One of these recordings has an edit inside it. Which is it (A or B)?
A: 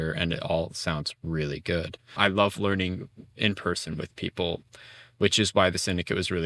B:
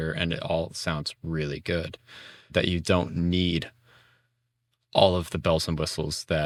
A